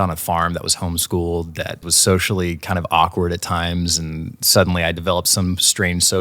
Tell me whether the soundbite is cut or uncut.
cut